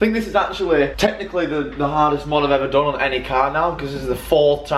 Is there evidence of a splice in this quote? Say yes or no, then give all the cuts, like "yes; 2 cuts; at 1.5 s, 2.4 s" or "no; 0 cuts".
yes; 1 cut; at 0.9 s